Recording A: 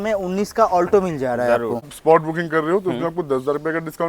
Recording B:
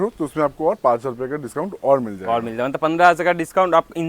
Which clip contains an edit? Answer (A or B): A